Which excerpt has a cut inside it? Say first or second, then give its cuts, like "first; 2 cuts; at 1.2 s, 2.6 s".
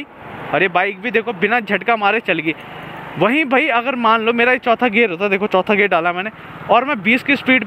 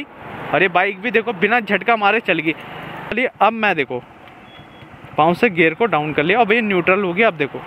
second; 1 cut; at 3.1 s